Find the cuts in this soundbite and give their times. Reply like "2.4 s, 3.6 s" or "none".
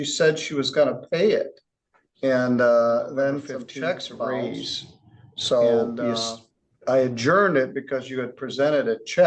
4.3 s